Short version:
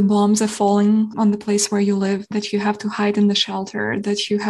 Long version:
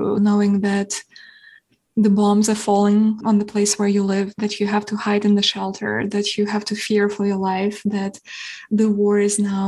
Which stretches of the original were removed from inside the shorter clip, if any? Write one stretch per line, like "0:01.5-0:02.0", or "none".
none